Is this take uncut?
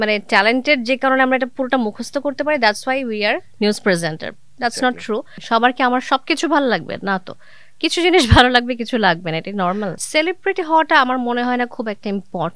no; 2 cuts; at 5.3 s, 10.0 s

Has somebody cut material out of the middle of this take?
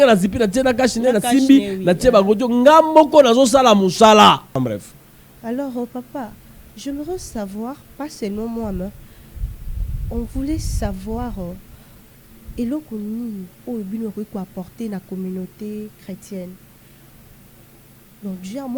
yes; 1 cut; at 4.6 s

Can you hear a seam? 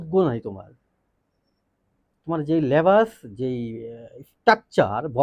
no; 0 cuts

